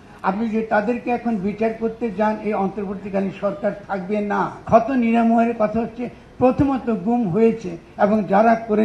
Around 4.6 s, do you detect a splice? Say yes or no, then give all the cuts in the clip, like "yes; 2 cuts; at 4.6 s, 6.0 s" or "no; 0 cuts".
yes; 1 cut; at 4.6 s